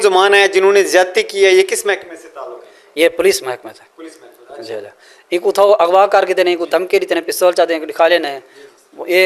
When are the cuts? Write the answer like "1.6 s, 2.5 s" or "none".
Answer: none